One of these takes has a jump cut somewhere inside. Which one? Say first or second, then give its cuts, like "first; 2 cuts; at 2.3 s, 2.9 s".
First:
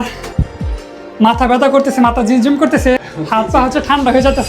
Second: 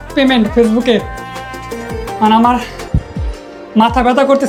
first; 1 cut; at 3.0 s